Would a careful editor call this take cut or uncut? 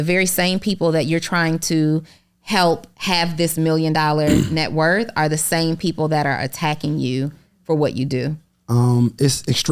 uncut